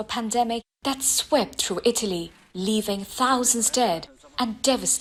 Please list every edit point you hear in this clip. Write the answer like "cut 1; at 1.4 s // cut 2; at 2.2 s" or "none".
none